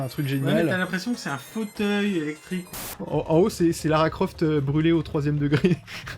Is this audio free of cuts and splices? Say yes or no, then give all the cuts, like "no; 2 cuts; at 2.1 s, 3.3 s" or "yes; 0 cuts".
no; 1 cut; at 2.8 s